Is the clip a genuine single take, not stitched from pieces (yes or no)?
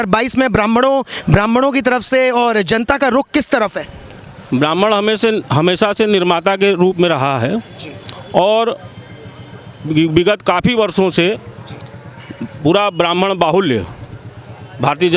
yes